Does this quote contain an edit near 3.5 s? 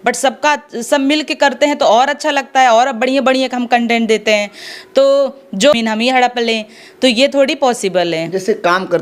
no; 1 cut; at 5.8 s

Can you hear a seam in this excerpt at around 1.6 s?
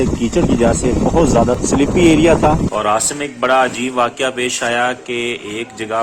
yes; 2 cuts; at 1.6 s, 2.7 s

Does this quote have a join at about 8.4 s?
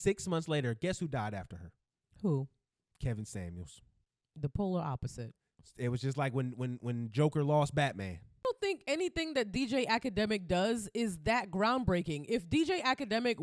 yes; 1 cut; at 8.4 s

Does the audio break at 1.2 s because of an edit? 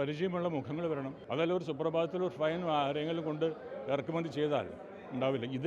yes; 1 cut; at 1.2 s

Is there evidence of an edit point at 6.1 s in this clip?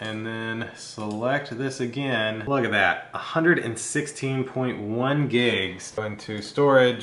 yes; 1 cut; at 6.1 s

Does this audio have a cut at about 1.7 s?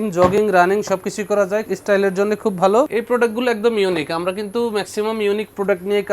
yes; 2 cuts; at 1.7 s, 2.9 s

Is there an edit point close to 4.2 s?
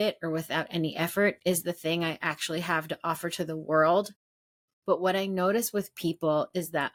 no; 0 cuts

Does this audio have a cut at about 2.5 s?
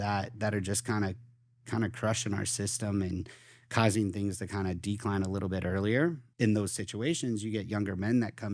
no; 1 cut; at 6.3 s

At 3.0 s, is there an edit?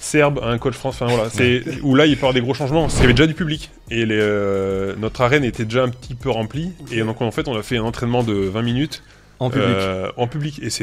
yes; 1 cut; at 3.0 s

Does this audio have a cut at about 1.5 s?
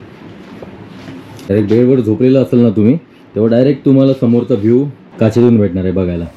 yes; 2 cuts; at 1.5 s, 5.0 s

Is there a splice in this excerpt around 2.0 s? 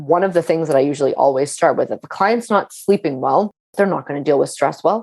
no; 1 cut; at 3.6 s

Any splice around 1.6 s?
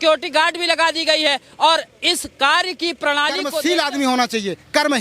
no; 1 cut; at 3.6 s

